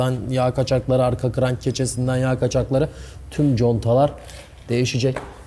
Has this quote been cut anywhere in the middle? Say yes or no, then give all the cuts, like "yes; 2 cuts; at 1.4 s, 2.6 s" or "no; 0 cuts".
no; 0 cuts